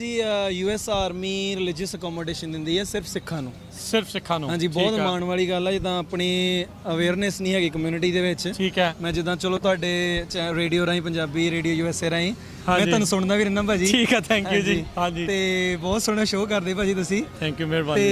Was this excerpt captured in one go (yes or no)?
yes